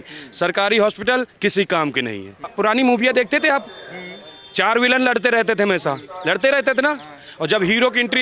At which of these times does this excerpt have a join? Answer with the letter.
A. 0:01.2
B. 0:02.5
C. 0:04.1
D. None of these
B